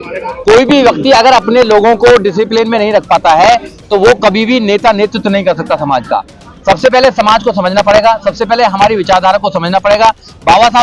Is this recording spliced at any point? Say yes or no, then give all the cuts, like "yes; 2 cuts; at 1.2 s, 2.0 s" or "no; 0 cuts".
no; 0 cuts